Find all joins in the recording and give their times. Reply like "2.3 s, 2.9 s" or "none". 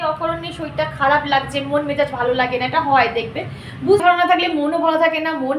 4.0 s